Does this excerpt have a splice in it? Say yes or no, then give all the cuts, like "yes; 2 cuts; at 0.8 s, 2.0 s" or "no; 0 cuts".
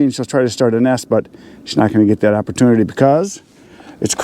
no; 0 cuts